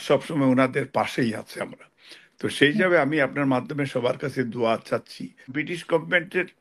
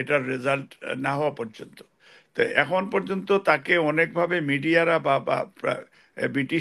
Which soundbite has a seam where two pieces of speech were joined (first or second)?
first